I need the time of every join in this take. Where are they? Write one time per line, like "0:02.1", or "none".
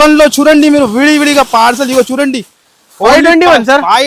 none